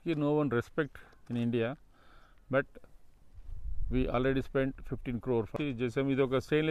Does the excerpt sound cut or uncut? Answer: cut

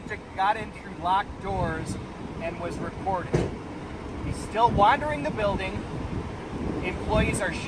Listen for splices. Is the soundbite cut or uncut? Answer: uncut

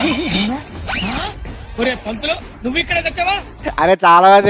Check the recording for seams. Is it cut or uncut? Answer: cut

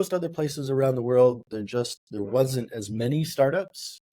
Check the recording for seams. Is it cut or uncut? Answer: uncut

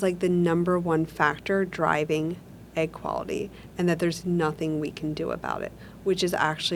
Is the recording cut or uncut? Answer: uncut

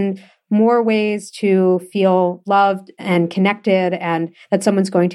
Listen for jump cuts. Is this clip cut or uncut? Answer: uncut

